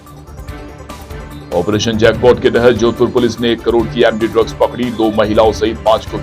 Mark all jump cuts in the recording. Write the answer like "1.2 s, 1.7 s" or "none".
none